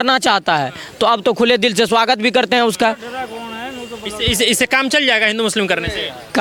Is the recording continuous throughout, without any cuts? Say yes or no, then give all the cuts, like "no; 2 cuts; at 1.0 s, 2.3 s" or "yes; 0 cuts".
yes; 0 cuts